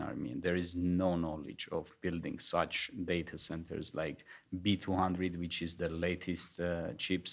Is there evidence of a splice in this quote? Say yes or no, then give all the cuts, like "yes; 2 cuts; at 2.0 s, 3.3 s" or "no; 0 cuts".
no; 0 cuts